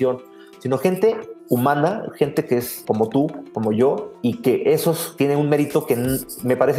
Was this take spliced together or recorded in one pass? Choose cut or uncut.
cut